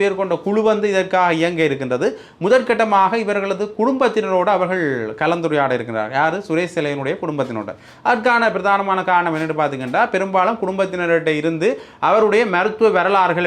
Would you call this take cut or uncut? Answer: uncut